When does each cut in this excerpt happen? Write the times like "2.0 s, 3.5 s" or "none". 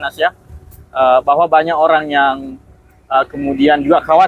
none